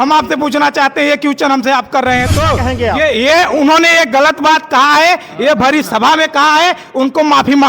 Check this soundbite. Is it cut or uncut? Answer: cut